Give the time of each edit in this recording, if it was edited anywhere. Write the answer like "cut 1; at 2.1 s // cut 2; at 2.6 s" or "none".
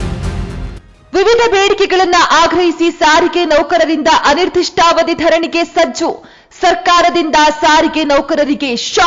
none